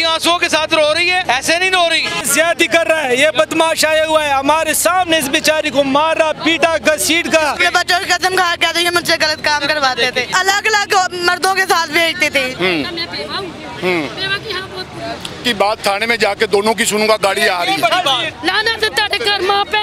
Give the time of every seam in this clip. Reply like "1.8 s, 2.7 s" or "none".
1.2 s, 2.3 s, 7.6 s, 10.3 s, 12.5 s, 15.4 s, 18.3 s